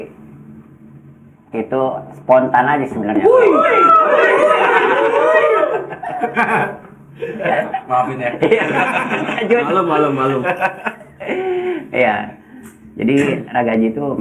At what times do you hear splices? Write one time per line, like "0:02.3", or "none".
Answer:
none